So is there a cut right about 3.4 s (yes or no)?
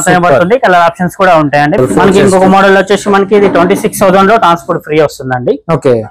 no